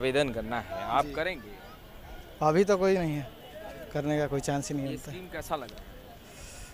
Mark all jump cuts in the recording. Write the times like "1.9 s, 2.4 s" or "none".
none